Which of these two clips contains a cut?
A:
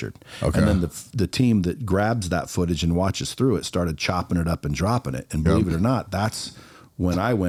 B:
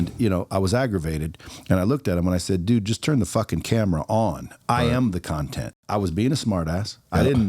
B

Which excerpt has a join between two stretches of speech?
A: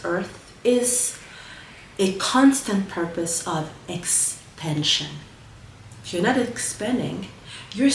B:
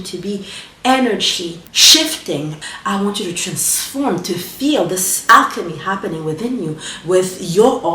B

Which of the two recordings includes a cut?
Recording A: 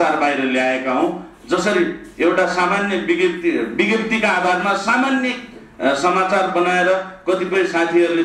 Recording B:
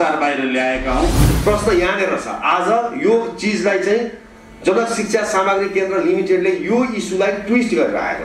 B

